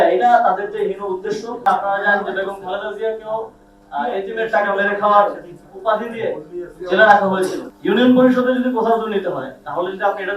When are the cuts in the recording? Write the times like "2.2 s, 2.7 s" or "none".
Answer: 1.6 s, 7.7 s